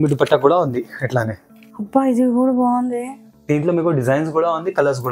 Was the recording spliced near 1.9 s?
yes; 1 cut; at 1.9 s

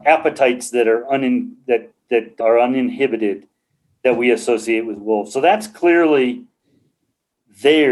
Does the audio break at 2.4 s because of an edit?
yes; 1 cut; at 2.4 s

